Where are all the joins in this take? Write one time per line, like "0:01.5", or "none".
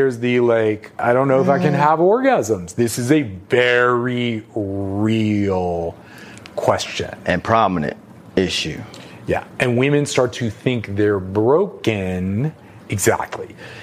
0:01.0